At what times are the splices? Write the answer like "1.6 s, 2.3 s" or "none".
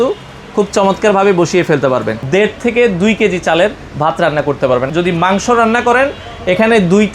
2.2 s, 4.9 s